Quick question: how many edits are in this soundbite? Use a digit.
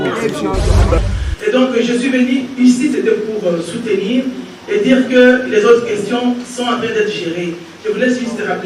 1